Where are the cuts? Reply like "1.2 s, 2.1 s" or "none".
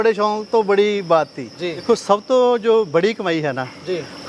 1.8 s